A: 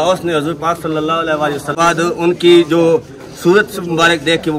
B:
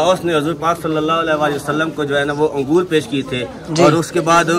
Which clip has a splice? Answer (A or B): A